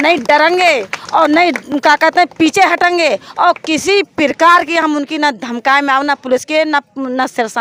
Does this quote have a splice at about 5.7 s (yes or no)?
no